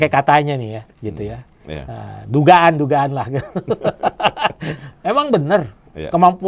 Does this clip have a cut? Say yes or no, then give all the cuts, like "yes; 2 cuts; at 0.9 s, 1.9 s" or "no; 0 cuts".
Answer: no; 0 cuts